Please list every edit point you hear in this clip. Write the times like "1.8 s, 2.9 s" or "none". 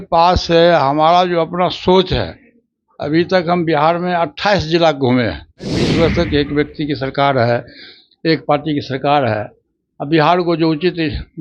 5.8 s

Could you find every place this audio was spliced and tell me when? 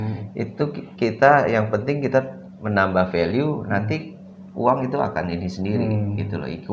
none

